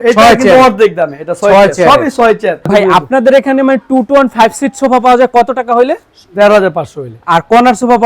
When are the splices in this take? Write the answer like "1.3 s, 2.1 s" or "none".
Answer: 2.7 s